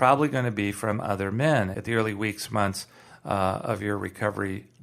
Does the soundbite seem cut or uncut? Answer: cut